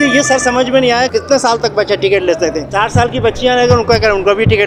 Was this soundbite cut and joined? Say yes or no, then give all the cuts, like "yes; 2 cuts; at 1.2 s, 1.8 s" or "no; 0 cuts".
no; 0 cuts